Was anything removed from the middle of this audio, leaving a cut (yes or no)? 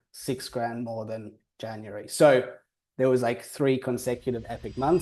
no